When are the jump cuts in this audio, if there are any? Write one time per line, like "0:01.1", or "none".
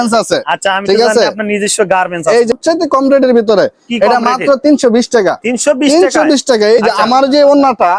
0:02.5
0:06.8